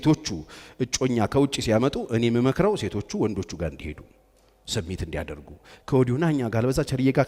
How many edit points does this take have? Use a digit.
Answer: 0